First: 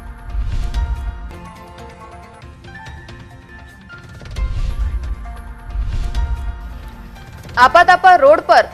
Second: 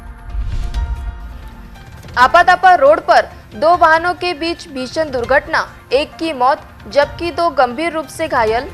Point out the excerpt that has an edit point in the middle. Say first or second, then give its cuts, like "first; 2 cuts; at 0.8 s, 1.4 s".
first; 1 cut; at 1.2 s